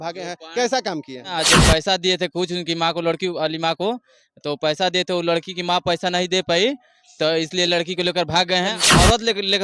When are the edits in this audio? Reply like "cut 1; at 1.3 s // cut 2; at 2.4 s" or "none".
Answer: cut 1; at 1.3 s // cut 2; at 8.7 s